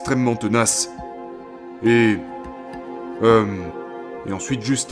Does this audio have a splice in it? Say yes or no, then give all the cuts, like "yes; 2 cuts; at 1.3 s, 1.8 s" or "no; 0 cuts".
no; 0 cuts